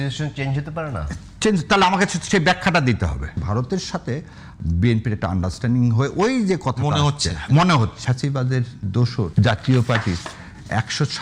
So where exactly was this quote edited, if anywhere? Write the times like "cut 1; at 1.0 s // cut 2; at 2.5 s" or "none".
cut 1; at 3.4 s // cut 2; at 8.0 s // cut 3; at 9.3 s